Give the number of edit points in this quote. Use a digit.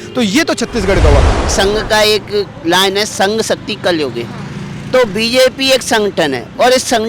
1